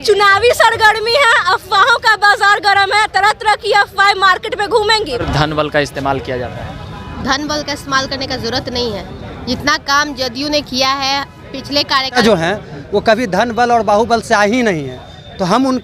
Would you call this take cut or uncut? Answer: cut